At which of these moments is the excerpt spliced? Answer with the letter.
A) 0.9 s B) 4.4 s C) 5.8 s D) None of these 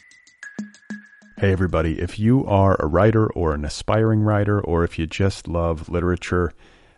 A